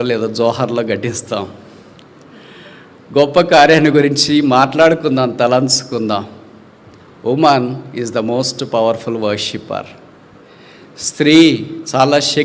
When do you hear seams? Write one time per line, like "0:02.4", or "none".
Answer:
none